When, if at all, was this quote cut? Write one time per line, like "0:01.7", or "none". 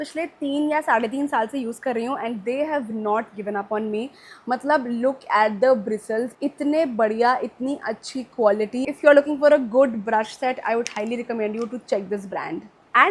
none